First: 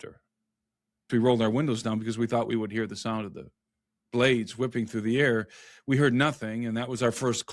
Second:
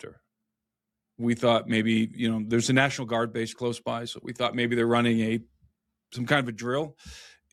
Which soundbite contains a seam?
first; 1 cut; at 1.1 s

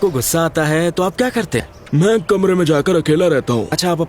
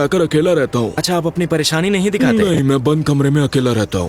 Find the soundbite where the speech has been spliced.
first; 1 cut; at 1.8 s

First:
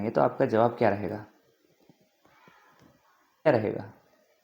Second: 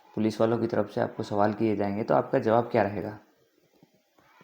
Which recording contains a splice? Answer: first; 1 cut; at 3.5 s

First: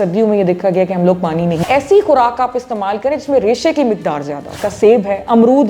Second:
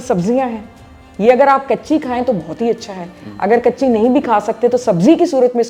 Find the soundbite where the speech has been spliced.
first; 2 cuts; at 1.6 s, 4.6 s

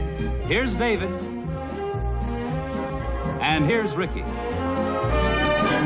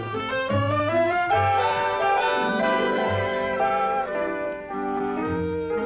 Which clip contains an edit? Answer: second; 1 cut; at 1.3 s

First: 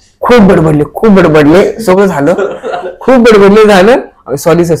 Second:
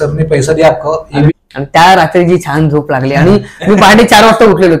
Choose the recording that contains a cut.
second; 1 cut; at 1.3 s

